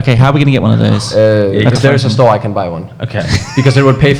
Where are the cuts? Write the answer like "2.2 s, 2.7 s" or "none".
none